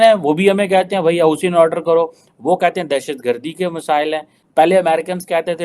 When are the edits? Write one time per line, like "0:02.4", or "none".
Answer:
0:04.5